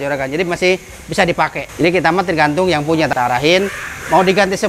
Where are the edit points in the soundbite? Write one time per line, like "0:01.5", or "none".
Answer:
0:01.6
0:03.1